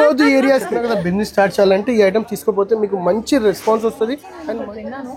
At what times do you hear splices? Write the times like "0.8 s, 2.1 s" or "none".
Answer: 0.9 s, 4.3 s